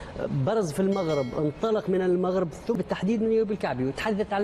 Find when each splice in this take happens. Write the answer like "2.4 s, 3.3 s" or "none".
2.8 s